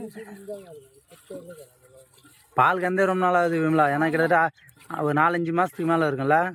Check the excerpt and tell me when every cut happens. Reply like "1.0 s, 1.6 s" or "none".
none